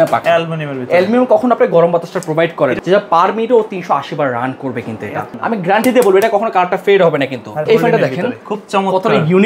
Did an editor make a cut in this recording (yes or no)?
yes